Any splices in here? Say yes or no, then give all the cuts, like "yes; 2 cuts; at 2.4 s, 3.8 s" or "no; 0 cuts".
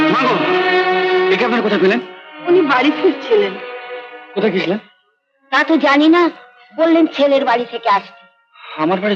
no; 0 cuts